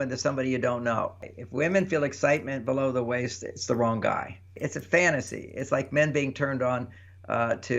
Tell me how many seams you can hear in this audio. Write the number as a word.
two